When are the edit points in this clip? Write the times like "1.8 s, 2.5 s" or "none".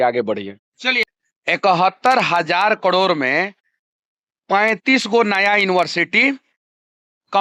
1.0 s